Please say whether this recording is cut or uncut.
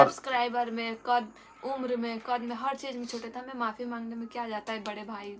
uncut